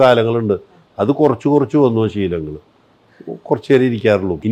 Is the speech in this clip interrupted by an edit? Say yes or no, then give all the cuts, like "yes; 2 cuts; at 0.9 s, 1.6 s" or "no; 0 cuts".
no; 0 cuts